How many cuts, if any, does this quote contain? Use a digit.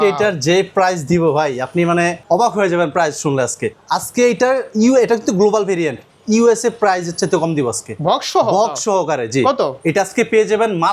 2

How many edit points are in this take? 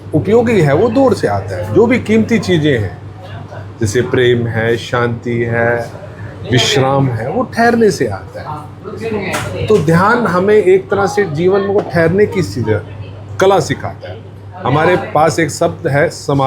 0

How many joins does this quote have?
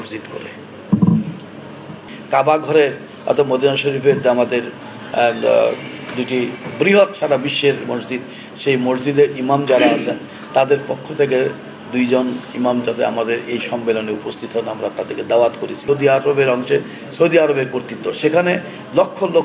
2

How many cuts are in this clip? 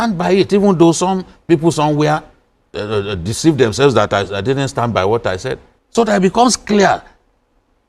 1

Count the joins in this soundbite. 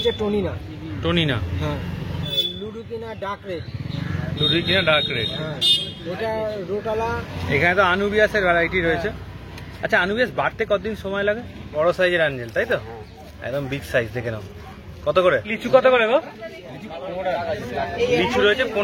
4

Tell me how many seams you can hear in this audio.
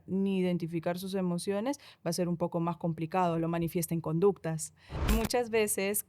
1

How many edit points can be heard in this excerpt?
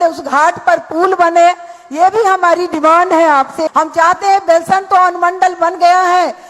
1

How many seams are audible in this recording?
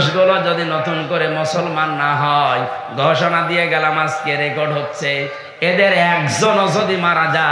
0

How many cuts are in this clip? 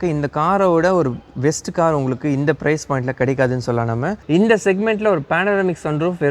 1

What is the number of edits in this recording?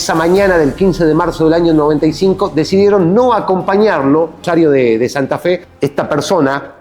2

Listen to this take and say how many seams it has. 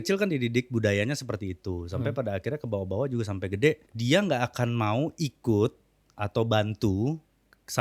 1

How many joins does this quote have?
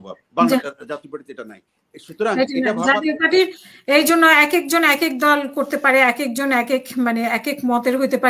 0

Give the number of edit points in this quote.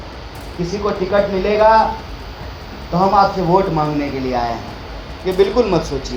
0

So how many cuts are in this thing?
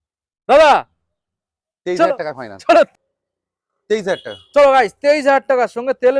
1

